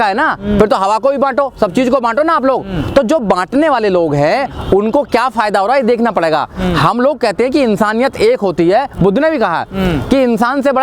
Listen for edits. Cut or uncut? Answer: uncut